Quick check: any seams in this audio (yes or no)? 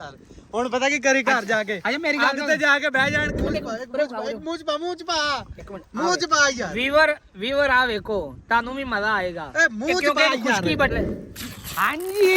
yes